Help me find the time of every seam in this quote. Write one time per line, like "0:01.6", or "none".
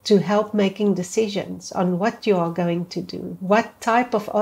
none